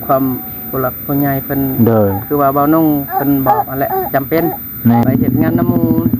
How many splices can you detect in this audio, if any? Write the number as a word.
one